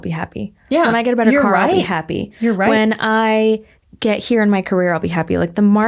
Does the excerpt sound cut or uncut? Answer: uncut